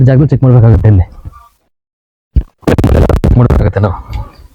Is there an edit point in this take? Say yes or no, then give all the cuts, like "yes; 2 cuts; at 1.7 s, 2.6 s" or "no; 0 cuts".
no; 0 cuts